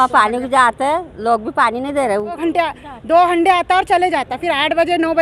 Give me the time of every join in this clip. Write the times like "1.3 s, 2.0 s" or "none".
2.4 s